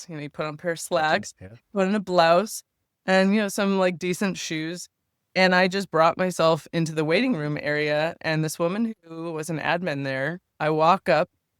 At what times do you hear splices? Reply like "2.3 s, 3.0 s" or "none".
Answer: 10.4 s